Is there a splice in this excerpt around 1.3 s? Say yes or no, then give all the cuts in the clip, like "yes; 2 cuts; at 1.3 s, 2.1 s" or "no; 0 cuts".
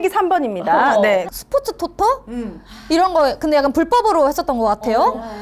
yes; 1 cut; at 1.3 s